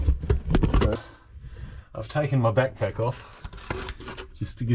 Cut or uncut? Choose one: cut